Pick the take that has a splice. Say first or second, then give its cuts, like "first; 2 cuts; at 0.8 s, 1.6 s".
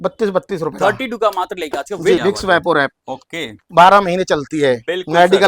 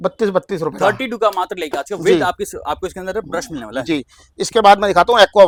first; 1 cut; at 2.2 s